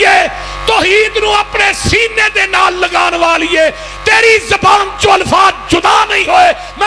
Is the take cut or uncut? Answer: uncut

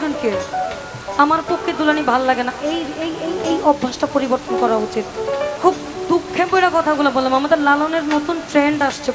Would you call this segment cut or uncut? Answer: cut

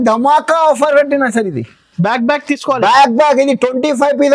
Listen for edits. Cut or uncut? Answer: uncut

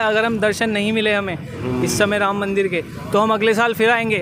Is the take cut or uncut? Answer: uncut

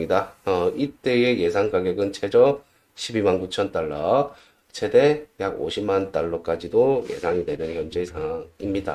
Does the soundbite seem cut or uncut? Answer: uncut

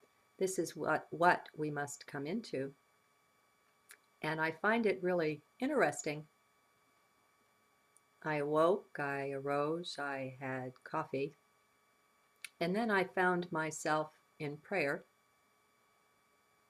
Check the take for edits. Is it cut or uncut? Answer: uncut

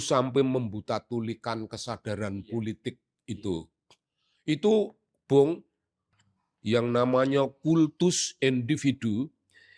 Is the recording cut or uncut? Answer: uncut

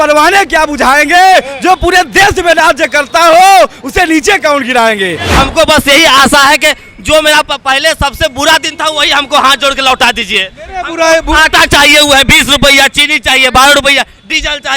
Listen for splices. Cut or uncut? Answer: cut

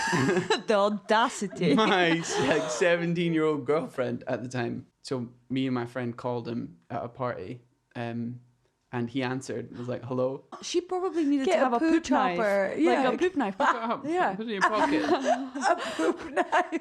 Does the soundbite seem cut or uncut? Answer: cut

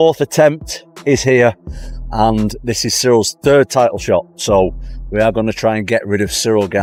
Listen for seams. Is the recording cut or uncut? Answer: uncut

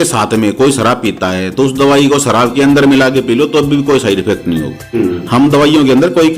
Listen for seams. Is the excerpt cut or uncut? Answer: cut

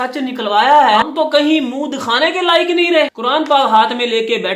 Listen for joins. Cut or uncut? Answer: cut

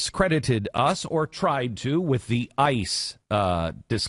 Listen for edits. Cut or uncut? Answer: cut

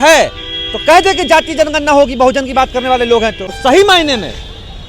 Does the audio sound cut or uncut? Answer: cut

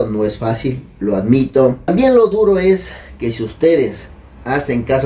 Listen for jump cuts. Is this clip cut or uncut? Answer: cut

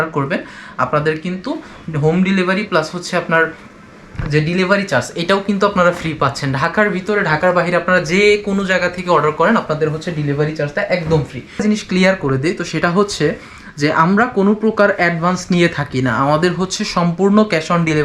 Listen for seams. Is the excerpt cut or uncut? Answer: cut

